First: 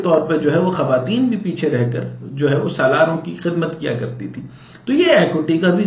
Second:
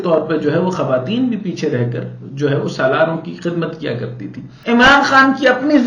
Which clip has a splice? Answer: second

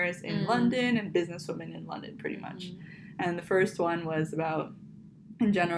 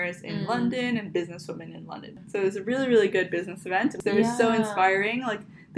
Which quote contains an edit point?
second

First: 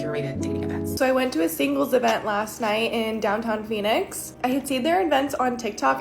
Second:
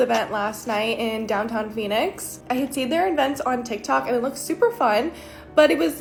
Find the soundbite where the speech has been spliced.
first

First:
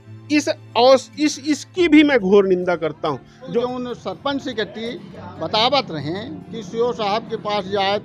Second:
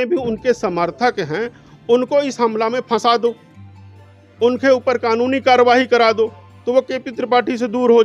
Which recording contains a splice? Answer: first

